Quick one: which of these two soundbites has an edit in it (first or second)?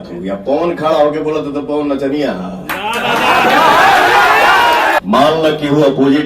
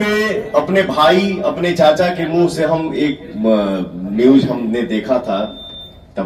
first